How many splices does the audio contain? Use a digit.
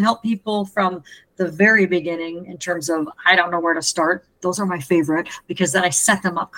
0